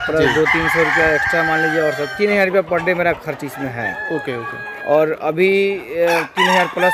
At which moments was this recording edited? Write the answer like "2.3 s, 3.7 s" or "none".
none